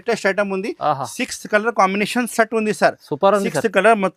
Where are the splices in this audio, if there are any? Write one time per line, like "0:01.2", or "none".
none

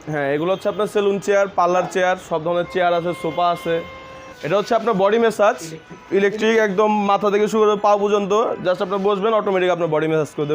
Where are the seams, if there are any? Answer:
0:04.3

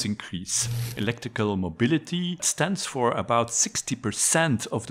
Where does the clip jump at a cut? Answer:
0:00.9
0:02.5

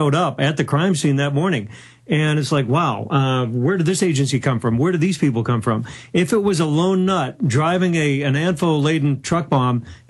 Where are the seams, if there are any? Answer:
0:03.2

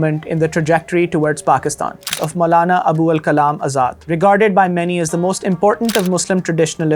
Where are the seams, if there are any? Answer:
0:02.1

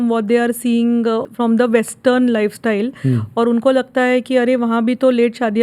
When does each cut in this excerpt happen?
0:01.3

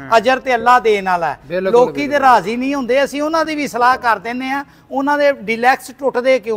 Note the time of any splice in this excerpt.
none

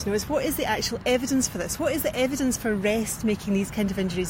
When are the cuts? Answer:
none

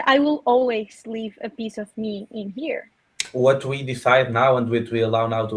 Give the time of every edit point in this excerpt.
0:03.2

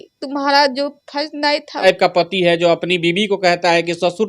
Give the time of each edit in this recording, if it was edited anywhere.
0:01.8

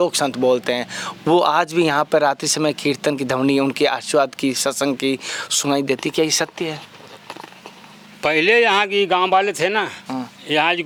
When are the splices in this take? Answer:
none

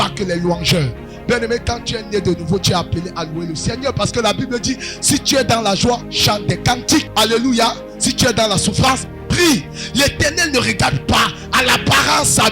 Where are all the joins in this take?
0:06.1
0:07.1
0:09.8

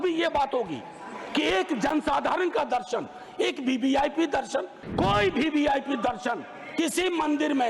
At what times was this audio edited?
0:04.8

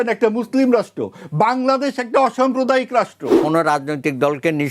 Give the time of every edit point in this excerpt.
0:03.4

